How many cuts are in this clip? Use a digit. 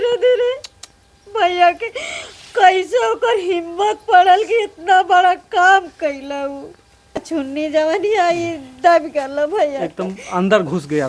1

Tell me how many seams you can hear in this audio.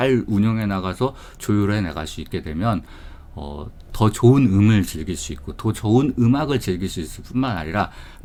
0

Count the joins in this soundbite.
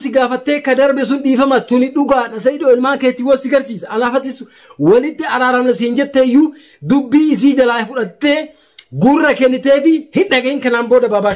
0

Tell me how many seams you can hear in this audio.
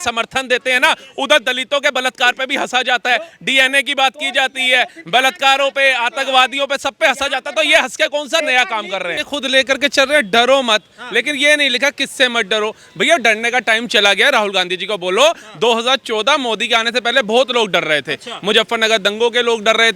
1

